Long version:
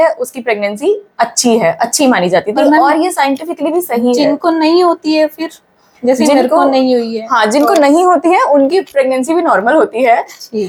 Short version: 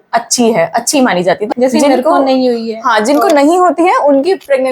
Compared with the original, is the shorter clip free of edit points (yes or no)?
no